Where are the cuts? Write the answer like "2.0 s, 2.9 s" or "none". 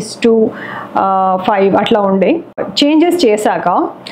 2.7 s